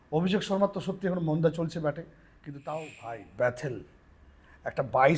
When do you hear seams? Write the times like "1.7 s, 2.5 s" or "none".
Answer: 3.0 s